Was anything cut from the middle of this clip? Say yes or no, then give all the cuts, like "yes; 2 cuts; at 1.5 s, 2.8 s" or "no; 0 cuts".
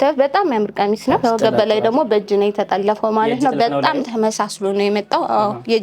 yes; 1 cut; at 1.2 s